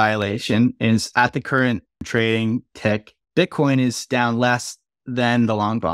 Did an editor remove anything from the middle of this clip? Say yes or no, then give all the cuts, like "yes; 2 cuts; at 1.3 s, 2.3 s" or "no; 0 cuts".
yes; 2 cuts; at 2.1 s, 3.2 s